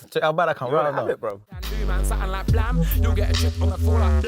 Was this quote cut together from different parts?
yes; 1 cut; at 1.5 s

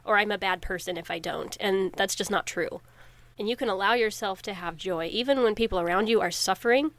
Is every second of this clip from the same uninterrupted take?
yes; 0 cuts

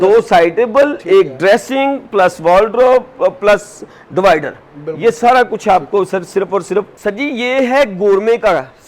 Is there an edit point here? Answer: yes; 1 cut; at 6.9 s

